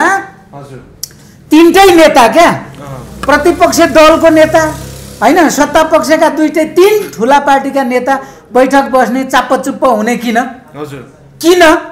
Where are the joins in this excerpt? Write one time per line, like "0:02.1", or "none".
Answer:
none